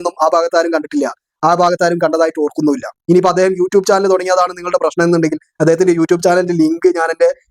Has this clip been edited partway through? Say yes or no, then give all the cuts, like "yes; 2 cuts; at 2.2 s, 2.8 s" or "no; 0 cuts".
yes; 1 cut; at 2.9 s